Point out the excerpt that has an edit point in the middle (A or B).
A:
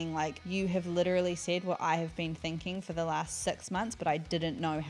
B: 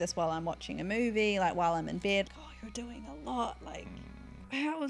B